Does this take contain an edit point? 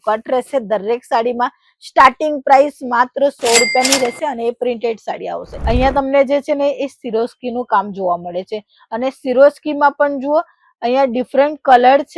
yes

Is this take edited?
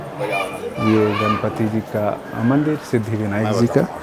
no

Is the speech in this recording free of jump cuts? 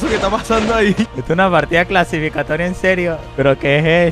no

